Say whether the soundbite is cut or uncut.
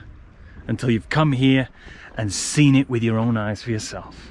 uncut